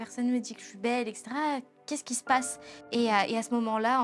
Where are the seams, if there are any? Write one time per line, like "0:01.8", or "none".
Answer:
0:02.9

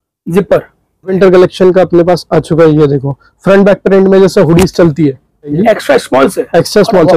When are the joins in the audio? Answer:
0:01.1
0:05.5

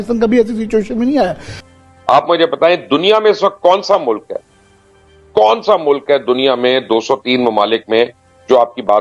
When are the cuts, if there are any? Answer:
0:01.5

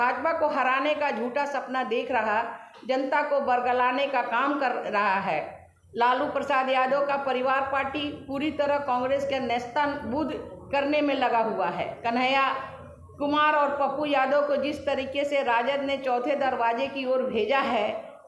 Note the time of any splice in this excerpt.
none

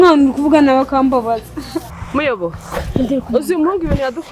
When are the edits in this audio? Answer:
0:02.0

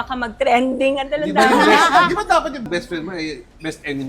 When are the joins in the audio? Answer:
0:02.7

